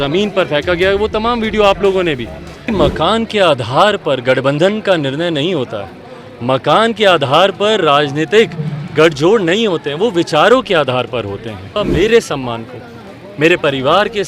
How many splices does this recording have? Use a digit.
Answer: 2